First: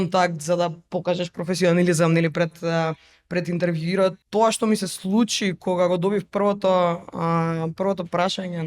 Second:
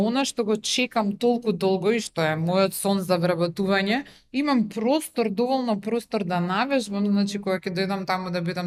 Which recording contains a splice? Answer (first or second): first